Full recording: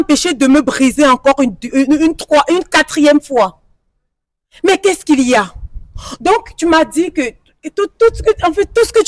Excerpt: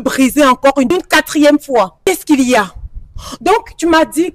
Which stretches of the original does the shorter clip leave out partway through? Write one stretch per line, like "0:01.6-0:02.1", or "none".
0:01.5-0:02.5
0:03.7-0:04.9